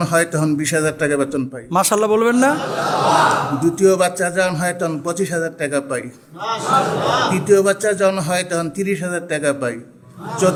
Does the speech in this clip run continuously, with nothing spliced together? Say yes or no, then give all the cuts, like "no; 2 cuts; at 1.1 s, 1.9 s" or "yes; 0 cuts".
yes; 0 cuts